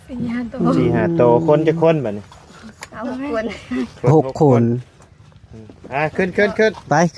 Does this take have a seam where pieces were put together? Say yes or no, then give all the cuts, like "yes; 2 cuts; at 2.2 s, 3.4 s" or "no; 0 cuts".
no; 0 cuts